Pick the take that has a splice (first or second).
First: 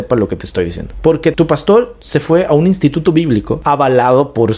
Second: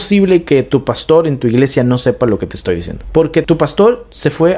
first